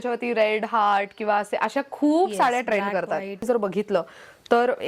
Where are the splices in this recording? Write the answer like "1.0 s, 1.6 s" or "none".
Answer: 3.4 s

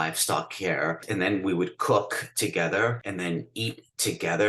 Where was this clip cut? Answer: 1.0 s, 3.0 s

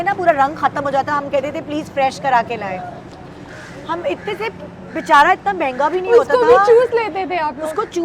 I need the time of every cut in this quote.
none

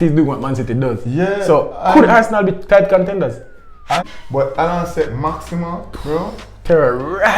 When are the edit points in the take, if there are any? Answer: 4.0 s

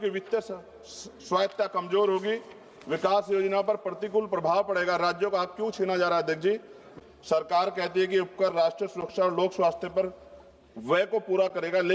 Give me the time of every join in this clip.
6.9 s

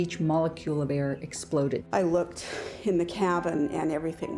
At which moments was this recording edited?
1.8 s

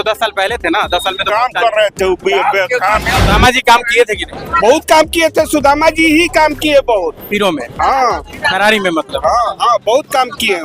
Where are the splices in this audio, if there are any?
3.1 s

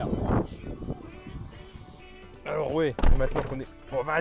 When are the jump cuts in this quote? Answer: 1.9 s

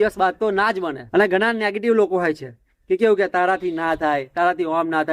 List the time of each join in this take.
1.0 s

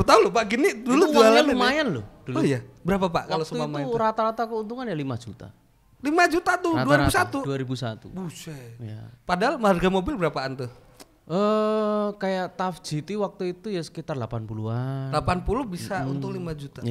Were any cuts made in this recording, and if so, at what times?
none

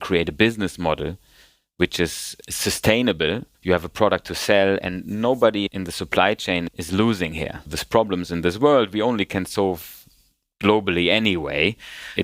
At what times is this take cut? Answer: 2.3 s, 5.7 s, 6.7 s

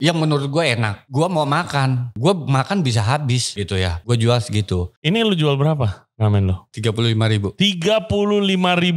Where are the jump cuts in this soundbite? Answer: 1.0 s, 2.1 s, 3.7 s, 4.9 s, 6.7 s

